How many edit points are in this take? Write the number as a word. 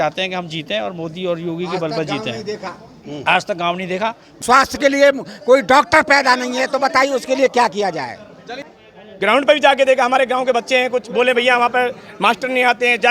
two